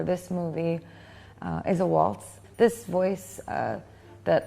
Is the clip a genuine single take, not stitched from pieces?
no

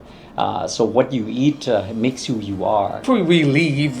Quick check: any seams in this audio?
yes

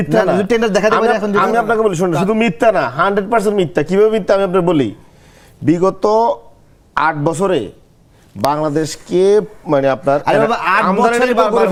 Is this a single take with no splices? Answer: yes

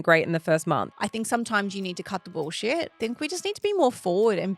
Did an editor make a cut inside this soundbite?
yes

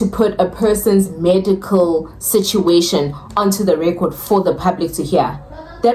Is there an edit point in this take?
no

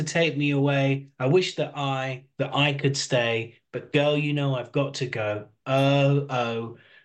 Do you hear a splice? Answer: no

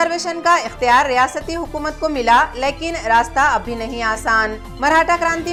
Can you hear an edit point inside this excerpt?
no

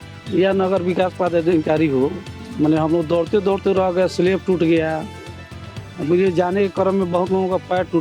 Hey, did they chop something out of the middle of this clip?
no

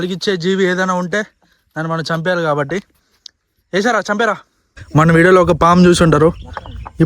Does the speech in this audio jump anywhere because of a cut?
yes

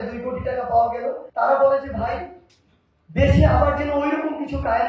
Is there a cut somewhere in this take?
yes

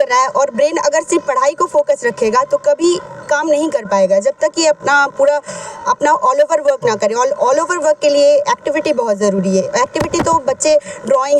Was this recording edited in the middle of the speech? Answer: no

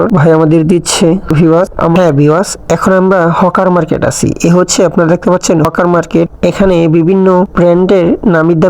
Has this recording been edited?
yes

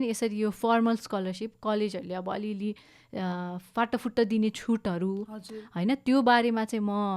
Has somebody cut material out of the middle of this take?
no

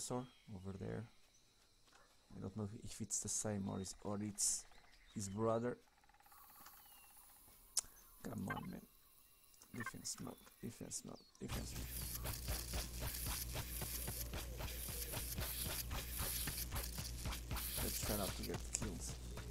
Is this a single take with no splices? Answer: yes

